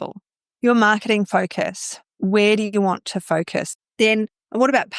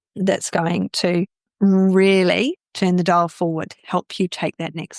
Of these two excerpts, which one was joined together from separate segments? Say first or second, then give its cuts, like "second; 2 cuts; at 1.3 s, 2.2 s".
first; 1 cut; at 3.7 s